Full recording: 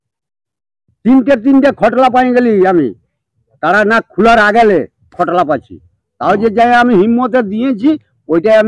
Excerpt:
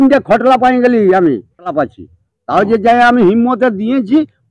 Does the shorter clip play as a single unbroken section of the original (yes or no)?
no